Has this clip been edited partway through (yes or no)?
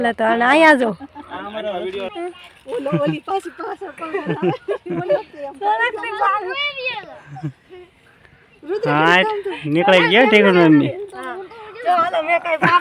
yes